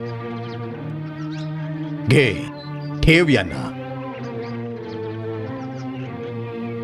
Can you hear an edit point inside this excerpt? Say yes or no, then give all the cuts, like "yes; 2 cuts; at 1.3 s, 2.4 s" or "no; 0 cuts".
yes; 1 cut; at 1.9 s